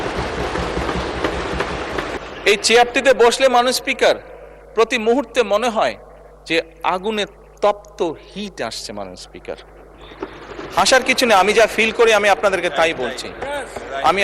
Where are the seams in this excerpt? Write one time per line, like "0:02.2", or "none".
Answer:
0:02.2